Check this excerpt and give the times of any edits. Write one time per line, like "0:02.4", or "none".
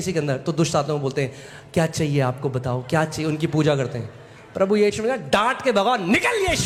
none